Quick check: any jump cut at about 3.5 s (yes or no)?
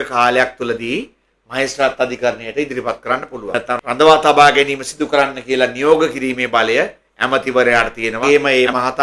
yes